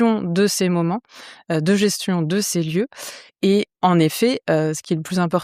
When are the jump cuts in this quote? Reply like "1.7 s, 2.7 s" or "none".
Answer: none